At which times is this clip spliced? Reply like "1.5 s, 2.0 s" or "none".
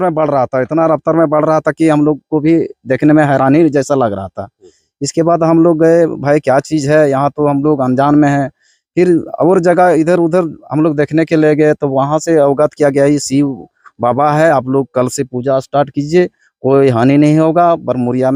none